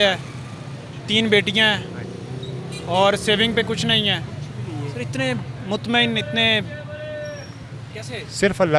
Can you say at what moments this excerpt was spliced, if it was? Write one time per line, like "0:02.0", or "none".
none

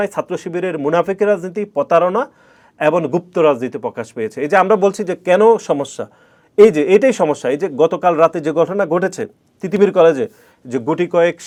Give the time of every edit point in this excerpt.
none

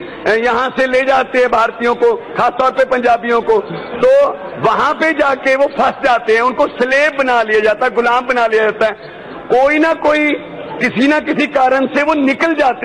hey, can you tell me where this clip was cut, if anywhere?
none

